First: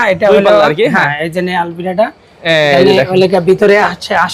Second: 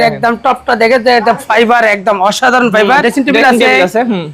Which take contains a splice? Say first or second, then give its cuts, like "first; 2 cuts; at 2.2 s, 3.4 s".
second; 1 cut; at 3.0 s